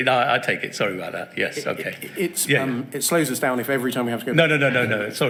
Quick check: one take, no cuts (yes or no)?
yes